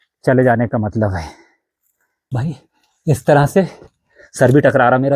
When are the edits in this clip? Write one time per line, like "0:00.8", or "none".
0:02.2